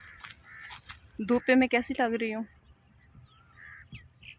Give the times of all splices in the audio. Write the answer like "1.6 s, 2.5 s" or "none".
1.0 s